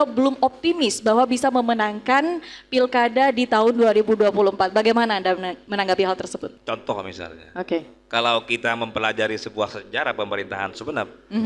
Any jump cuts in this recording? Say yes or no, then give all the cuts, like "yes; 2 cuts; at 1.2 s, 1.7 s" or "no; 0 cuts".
yes; 1 cut; at 6.5 s